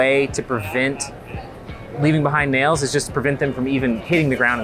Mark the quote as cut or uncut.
uncut